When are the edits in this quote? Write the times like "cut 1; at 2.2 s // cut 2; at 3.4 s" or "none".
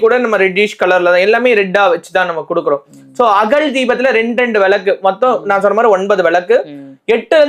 none

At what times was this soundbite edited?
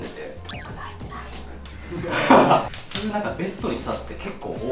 none

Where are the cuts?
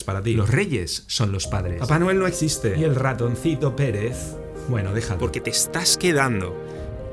cut 1; at 5.2 s

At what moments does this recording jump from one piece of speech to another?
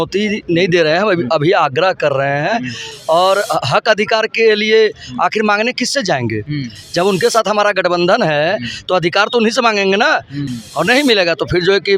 cut 1; at 10.5 s

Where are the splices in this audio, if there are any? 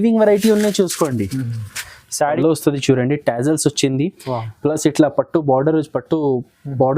cut 1; at 2.2 s

